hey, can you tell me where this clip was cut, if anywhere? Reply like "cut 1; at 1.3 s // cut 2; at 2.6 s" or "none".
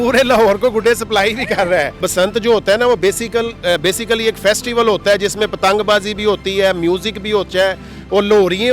cut 1; at 2.0 s

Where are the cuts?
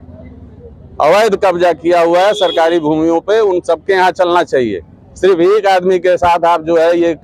none

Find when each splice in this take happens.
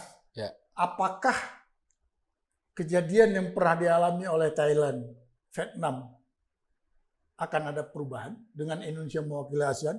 none

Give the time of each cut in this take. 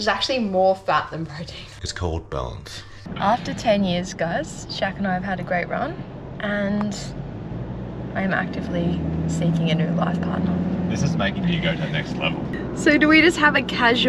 cut 1; at 3.0 s // cut 2; at 12.5 s

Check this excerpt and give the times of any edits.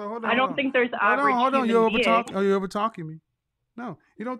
none

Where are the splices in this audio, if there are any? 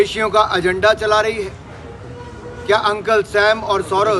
none

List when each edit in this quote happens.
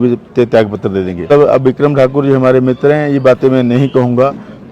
cut 1; at 1.3 s

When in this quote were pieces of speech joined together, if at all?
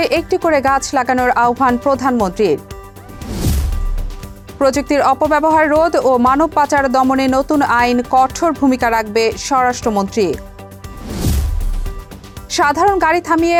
none

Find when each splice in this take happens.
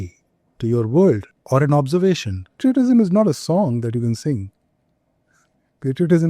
cut 1; at 1.3 s // cut 2; at 2.6 s

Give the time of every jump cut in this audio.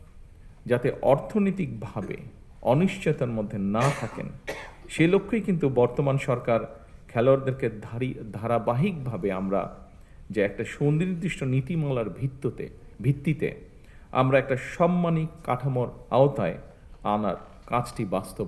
none

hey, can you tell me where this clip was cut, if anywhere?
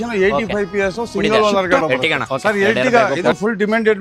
cut 1; at 1.8 s

